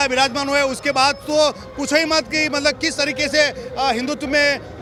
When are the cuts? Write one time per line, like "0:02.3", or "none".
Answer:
none